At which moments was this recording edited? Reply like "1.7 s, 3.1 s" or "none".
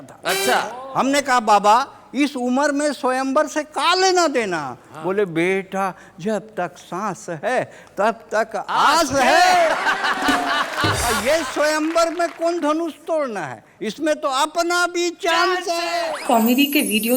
11.1 s, 15.9 s